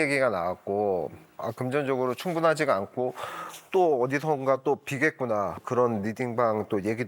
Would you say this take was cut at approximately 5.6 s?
yes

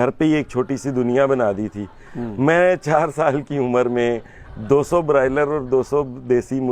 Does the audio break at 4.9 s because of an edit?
no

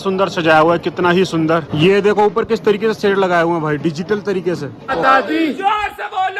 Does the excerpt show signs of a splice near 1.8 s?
yes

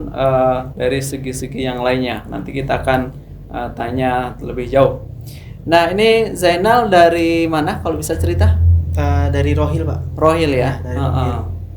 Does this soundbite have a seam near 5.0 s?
no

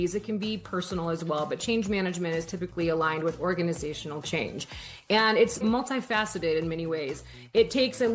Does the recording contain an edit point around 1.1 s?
no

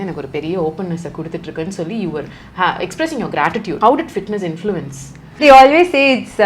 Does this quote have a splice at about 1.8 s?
no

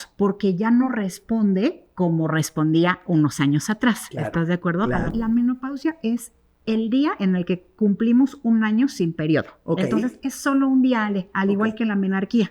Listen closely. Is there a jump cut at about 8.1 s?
no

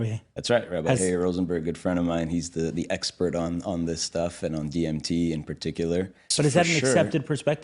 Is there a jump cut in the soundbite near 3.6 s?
no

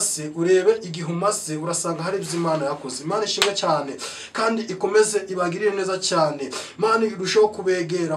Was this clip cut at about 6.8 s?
no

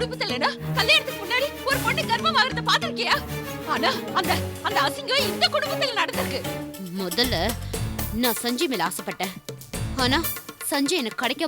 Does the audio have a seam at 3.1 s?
no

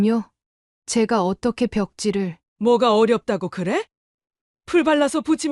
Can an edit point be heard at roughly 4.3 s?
no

